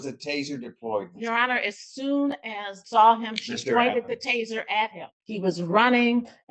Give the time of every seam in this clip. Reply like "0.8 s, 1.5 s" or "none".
2.7 s, 5.2 s